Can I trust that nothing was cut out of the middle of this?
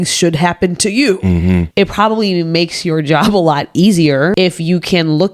no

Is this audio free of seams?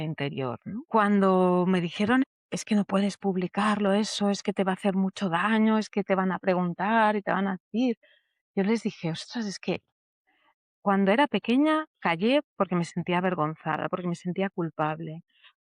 no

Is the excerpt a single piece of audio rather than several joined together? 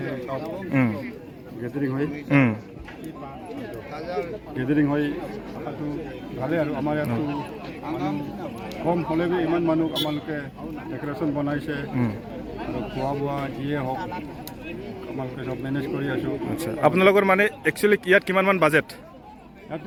yes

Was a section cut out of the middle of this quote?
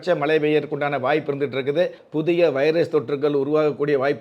yes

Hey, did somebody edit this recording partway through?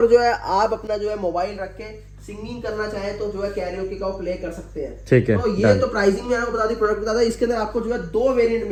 no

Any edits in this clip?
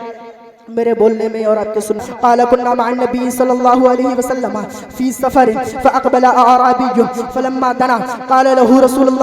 yes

